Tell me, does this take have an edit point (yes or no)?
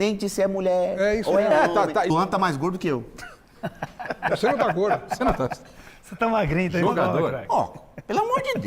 yes